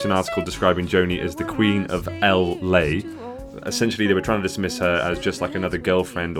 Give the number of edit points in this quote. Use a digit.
1